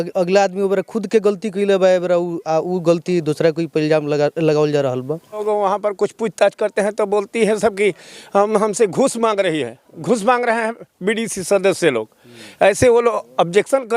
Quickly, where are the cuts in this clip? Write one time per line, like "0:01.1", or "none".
0:05.4